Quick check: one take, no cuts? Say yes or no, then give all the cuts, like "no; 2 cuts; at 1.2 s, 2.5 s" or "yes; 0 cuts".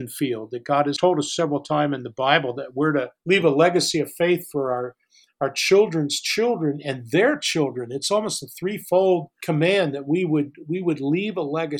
no; 3 cuts; at 1.0 s, 3.1 s, 9.3 s